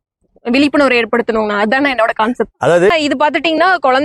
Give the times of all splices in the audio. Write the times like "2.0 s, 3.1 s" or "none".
2.9 s